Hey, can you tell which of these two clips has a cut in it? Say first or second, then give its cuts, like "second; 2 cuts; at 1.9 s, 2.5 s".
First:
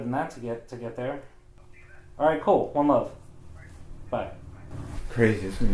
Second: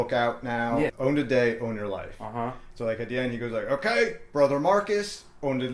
second; 1 cut; at 0.9 s